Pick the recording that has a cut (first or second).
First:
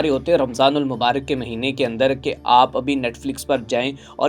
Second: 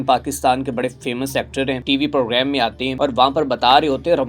second